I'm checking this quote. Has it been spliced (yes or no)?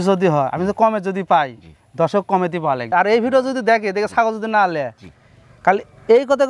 yes